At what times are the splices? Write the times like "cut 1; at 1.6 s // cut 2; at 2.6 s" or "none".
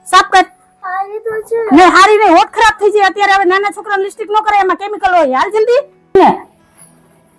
none